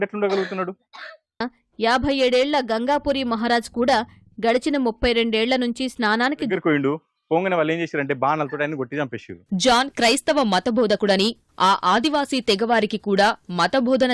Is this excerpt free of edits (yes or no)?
no